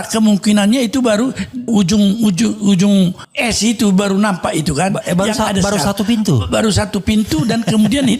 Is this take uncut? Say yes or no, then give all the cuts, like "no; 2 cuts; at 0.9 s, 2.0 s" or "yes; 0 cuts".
no; 2 cuts; at 1.6 s, 3.3 s